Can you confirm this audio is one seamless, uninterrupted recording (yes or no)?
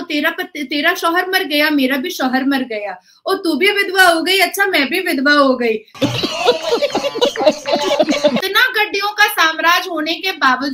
no